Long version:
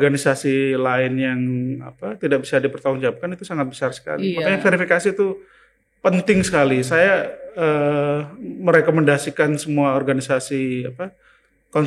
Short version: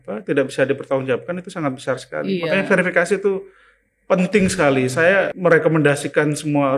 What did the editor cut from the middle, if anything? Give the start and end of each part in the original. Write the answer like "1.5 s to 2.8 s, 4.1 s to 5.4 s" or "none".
7.3 s to 8.6 s